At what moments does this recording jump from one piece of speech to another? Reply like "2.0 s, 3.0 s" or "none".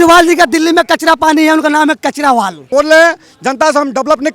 2.6 s